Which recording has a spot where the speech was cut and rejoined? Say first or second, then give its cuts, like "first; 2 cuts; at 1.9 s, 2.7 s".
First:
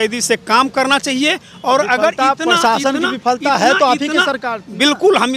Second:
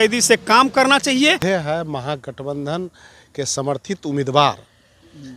second; 1 cut; at 1.4 s